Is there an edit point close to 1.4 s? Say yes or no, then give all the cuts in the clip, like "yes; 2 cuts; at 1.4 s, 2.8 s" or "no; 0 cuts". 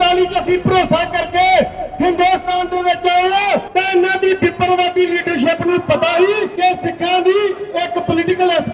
no; 2 cuts; at 3.7 s, 6.5 s